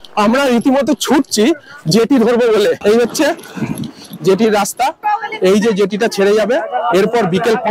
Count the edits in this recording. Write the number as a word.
two